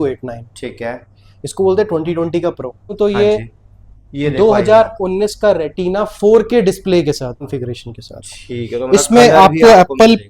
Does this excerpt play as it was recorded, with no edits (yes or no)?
no